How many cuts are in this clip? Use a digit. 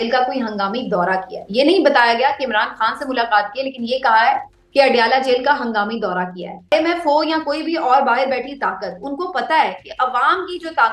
1